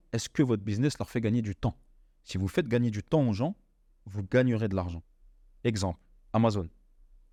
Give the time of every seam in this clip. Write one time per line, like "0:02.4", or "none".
none